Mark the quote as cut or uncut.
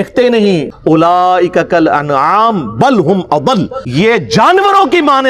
cut